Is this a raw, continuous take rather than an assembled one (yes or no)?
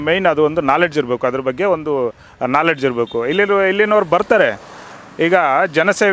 yes